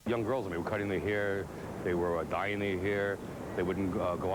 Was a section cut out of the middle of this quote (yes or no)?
no